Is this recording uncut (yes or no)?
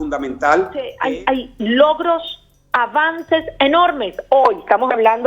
no